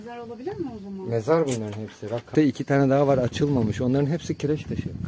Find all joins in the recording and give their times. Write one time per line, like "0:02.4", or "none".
0:02.3